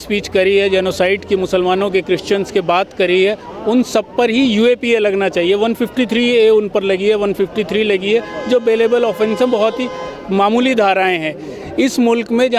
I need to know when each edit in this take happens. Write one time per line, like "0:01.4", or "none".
none